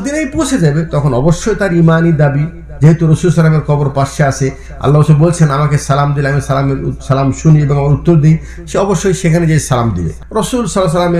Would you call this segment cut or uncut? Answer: cut